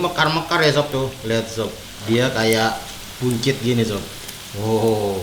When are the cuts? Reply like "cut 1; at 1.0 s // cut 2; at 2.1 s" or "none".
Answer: cut 1; at 1.9 s